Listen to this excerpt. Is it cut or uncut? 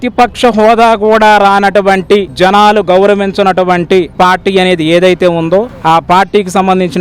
uncut